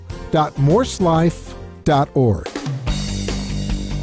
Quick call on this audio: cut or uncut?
cut